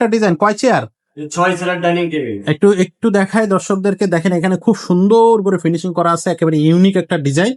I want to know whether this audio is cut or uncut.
uncut